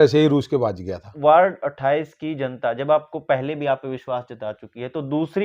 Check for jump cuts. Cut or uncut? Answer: cut